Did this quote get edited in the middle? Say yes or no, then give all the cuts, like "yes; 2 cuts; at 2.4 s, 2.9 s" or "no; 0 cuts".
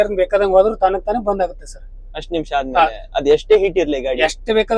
no; 0 cuts